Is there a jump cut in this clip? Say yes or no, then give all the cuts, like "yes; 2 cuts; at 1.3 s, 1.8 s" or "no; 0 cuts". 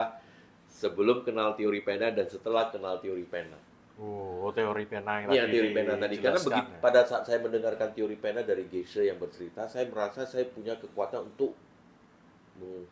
no; 0 cuts